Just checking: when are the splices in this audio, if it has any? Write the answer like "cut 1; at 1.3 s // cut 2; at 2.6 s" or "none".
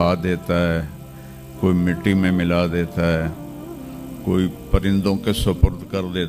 none